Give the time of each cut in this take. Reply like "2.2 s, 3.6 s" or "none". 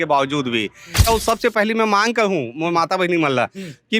1.0 s